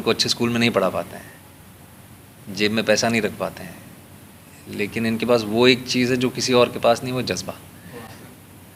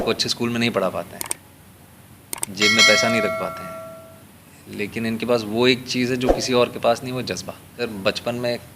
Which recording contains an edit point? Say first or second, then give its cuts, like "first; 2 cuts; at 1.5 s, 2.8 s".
second; 1 cut; at 7.8 s